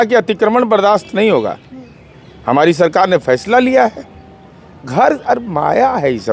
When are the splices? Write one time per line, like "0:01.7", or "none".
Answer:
none